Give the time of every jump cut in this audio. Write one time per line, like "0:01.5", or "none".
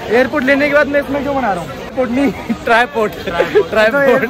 0:01.9